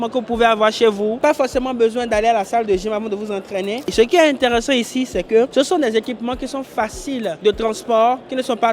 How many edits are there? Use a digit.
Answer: 2